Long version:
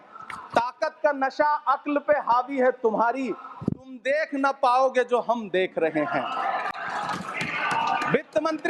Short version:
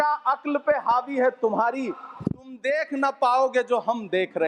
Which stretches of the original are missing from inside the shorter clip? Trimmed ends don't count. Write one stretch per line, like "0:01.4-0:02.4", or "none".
none